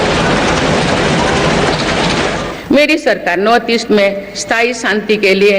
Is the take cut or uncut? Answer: cut